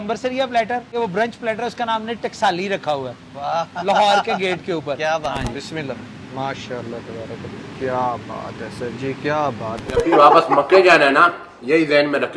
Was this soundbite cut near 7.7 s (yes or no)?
yes